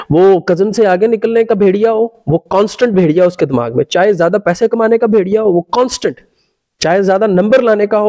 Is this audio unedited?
yes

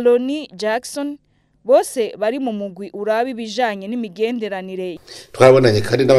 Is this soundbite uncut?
no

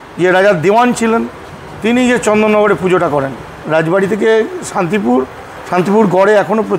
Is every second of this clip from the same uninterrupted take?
no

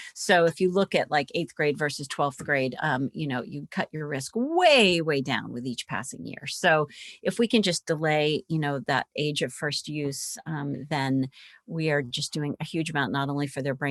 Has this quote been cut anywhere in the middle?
no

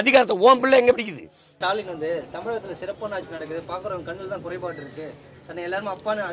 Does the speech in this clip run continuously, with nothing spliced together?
no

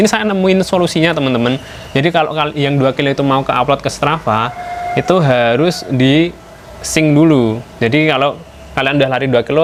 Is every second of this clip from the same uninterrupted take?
yes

